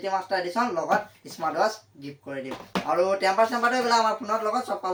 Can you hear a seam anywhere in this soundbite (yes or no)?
no